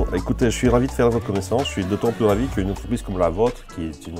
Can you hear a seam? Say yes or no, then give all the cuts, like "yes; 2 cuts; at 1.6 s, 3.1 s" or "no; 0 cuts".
no; 0 cuts